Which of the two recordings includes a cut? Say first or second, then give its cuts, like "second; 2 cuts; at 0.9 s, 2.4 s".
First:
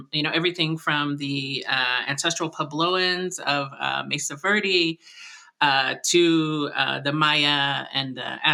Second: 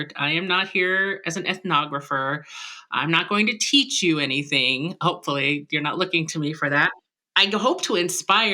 second; 1 cut; at 6.9 s